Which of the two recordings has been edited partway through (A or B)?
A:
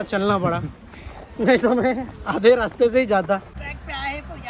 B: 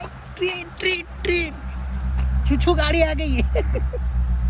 A